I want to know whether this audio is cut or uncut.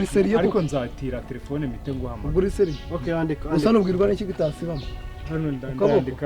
uncut